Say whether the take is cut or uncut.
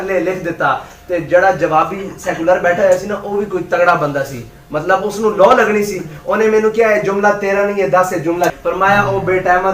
cut